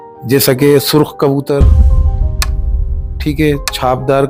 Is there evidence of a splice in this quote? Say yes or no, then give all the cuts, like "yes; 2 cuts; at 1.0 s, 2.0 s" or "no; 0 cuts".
no; 0 cuts